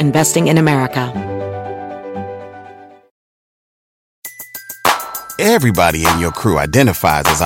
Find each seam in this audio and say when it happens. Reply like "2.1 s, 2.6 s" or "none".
1.1 s

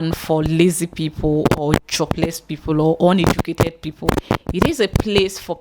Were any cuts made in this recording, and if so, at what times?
none

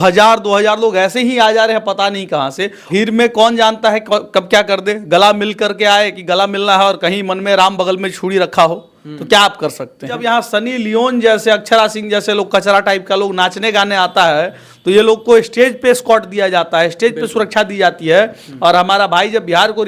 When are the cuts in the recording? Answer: 2.9 s, 10.2 s

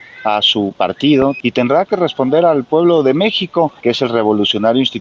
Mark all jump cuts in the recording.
1.4 s, 3.8 s

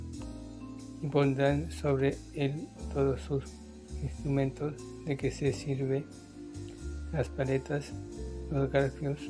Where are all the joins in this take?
1.0 s

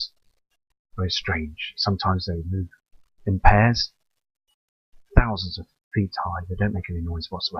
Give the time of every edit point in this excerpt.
5.3 s

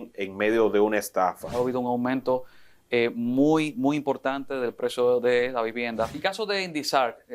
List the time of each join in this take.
1.5 s, 6.2 s

